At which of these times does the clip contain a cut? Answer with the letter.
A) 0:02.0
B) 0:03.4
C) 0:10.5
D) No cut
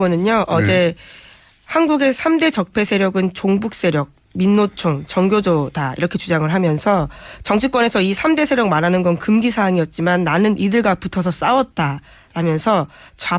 A